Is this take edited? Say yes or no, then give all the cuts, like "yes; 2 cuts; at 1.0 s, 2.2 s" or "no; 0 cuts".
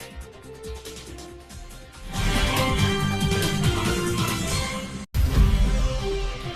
no; 0 cuts